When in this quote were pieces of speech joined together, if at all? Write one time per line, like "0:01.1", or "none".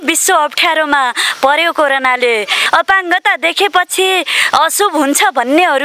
0:02.6